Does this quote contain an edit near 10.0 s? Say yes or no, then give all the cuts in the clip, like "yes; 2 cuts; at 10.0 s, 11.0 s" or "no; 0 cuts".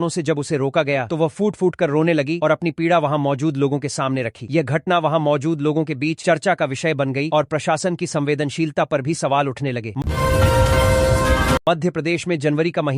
yes; 2 cuts; at 10.0 s, 11.6 s